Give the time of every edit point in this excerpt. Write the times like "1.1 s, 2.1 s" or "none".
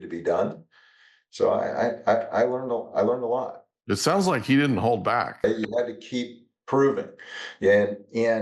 5.4 s